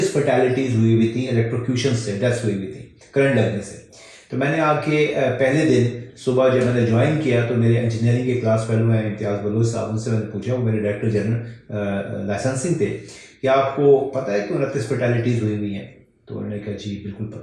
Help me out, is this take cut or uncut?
uncut